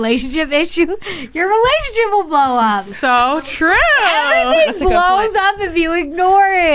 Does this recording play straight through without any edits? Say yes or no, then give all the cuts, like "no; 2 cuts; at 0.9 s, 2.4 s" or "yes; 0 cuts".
yes; 0 cuts